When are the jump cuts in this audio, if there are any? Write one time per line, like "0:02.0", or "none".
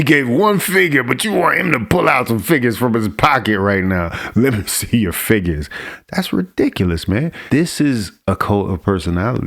0:07.4